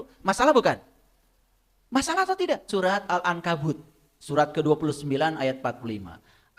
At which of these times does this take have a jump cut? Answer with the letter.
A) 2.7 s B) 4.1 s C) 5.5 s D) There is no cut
A